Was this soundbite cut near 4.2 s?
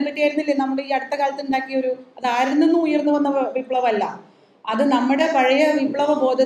no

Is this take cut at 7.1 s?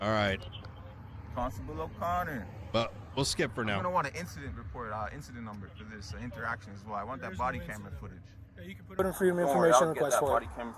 no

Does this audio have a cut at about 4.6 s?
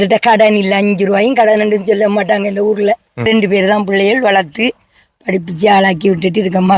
no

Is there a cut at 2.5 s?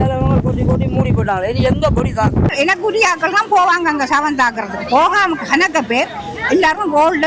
yes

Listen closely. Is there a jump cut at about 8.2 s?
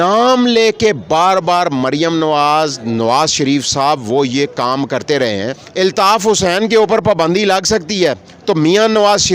no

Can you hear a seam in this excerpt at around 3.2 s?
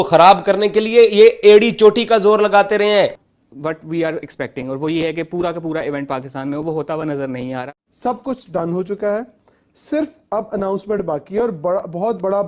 yes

